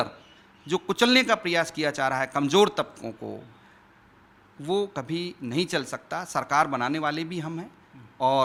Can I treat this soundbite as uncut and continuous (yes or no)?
yes